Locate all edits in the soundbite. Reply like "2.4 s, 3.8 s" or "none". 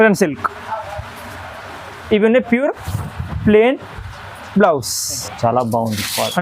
5.3 s